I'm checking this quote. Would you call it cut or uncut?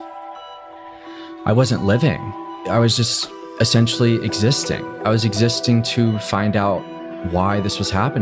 uncut